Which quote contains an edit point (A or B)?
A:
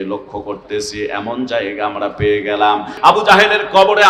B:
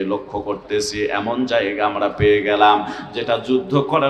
A